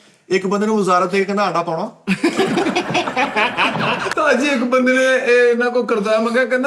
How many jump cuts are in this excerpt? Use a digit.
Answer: 1